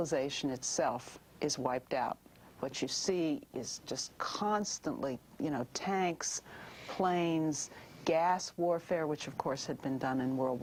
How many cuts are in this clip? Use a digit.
0